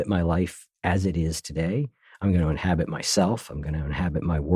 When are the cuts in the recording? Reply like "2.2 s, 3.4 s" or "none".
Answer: none